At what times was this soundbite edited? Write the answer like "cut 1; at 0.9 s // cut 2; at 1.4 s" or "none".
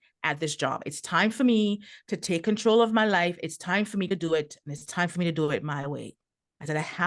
cut 1; at 4.1 s